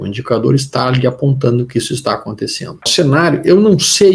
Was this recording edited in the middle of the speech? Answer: yes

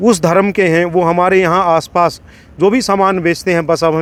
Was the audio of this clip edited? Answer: no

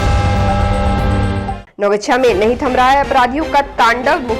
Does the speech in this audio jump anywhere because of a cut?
yes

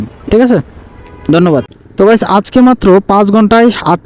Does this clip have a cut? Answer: yes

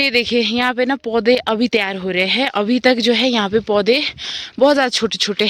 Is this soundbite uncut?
yes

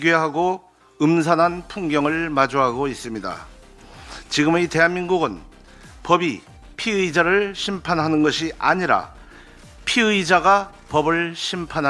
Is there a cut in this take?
no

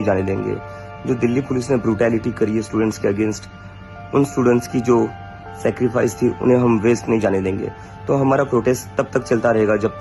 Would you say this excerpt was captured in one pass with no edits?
yes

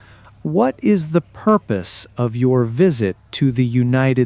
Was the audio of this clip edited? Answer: no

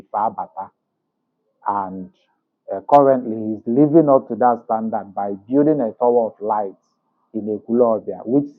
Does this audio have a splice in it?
no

